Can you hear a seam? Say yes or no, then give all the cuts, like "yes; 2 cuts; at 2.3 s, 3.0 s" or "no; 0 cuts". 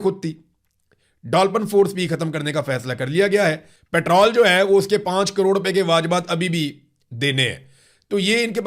yes; 1 cut; at 3.7 s